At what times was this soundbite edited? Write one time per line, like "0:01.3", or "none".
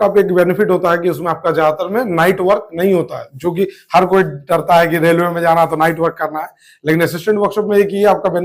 none